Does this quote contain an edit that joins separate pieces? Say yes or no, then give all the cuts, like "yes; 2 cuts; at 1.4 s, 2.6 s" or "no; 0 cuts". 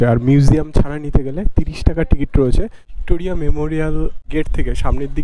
yes; 2 cuts; at 2.8 s, 4.2 s